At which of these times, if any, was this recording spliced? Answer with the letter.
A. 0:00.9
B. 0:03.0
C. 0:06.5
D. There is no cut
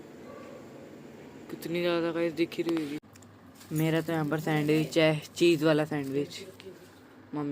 B